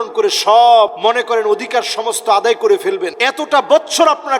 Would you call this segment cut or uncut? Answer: cut